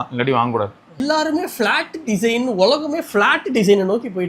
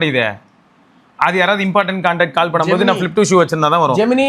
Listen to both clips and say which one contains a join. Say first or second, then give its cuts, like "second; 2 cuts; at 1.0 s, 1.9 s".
first; 1 cut; at 1.0 s